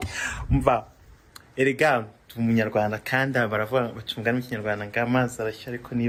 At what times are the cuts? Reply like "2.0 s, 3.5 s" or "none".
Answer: none